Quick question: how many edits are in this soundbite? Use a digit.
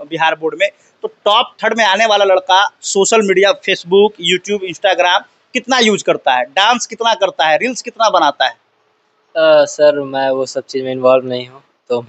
0